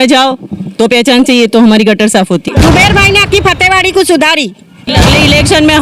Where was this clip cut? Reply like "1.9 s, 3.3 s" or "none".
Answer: 2.4 s, 4.9 s